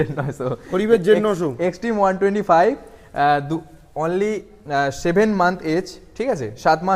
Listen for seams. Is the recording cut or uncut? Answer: uncut